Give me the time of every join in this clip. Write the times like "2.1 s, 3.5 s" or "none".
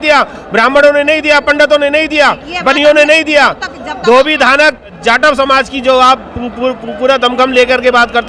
5.0 s